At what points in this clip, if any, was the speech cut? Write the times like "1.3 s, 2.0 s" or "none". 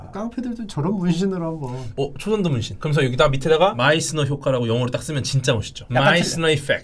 none